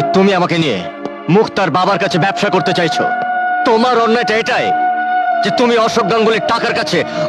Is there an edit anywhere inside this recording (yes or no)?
no